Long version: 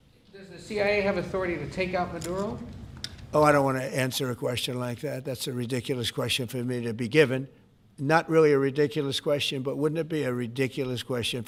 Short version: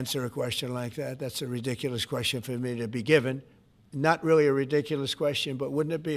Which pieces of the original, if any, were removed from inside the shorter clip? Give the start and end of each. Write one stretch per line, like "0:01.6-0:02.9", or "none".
none